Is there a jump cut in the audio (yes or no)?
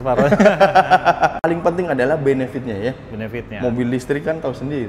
yes